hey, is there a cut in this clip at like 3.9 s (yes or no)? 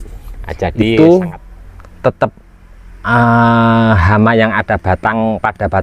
no